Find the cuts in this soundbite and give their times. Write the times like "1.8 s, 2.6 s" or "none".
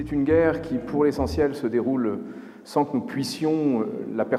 none